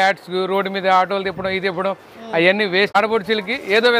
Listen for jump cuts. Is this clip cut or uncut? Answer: cut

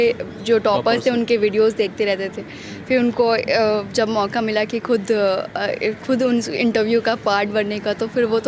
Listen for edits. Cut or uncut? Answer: uncut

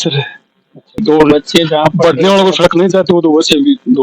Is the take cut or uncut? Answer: cut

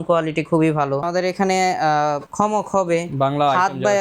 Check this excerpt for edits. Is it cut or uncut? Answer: cut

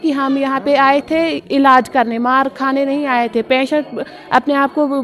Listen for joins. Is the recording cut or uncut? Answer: uncut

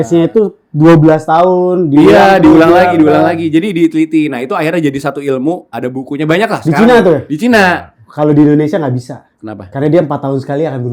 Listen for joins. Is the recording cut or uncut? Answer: uncut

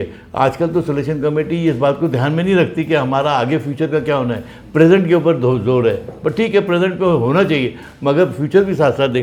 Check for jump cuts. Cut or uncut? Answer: uncut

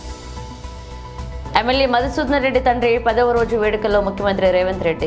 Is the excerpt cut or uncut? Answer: uncut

